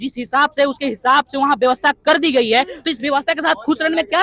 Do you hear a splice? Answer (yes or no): no